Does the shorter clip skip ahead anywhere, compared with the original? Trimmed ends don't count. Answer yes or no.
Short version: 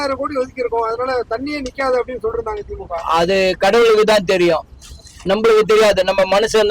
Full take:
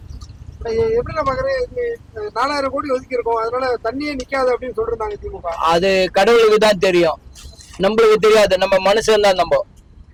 no